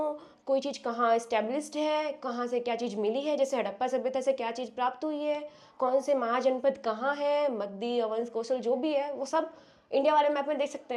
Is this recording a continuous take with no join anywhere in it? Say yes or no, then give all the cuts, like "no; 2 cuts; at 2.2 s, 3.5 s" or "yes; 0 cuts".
yes; 0 cuts